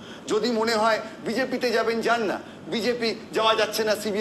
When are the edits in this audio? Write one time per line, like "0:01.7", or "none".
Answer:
none